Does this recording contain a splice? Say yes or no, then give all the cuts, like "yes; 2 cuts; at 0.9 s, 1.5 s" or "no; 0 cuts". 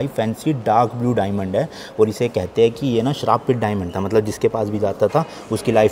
no; 0 cuts